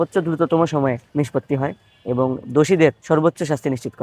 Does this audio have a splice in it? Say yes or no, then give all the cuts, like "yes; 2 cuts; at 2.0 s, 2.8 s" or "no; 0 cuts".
yes; 2 cuts; at 1.0 s, 3.0 s